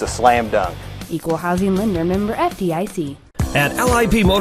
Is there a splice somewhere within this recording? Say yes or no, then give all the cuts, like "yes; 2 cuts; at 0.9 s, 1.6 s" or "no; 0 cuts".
yes; 1 cut; at 3.2 s